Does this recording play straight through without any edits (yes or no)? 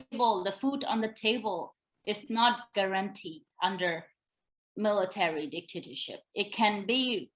yes